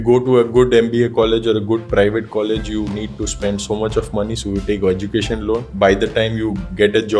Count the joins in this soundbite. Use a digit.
1